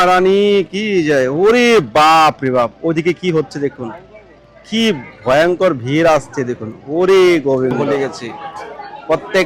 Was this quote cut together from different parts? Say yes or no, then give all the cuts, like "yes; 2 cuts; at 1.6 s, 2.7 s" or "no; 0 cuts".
yes; 1 cut; at 7.8 s